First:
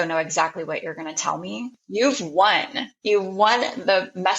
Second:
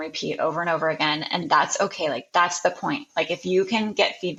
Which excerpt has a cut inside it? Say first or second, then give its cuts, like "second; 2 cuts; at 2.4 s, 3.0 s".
first; 1 cut; at 1.7 s